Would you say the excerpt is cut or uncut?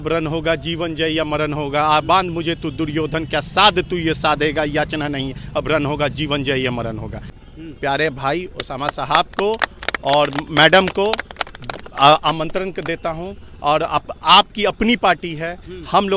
cut